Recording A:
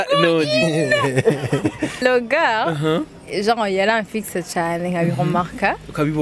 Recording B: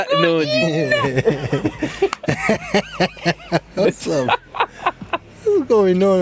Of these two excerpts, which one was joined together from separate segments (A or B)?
A